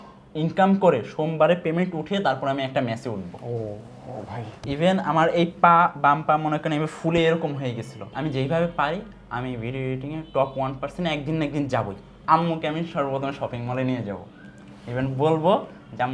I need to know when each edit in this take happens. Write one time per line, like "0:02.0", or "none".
0:04.7
0:08.1
0:12.1